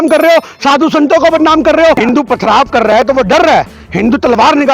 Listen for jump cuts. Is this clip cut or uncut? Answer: cut